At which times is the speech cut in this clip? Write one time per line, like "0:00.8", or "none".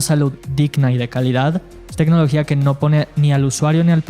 0:01.7